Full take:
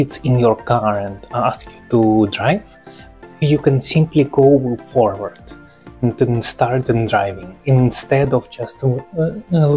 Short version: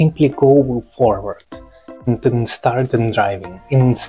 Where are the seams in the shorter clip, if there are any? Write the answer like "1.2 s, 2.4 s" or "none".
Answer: none